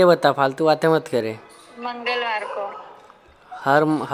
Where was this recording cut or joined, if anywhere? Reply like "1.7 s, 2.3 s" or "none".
none